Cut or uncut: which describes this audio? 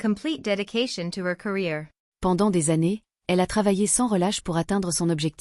uncut